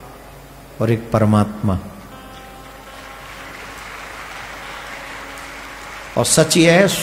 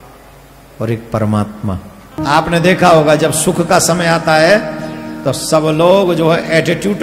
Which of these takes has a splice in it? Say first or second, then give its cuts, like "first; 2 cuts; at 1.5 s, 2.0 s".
second; 1 cut; at 2.2 s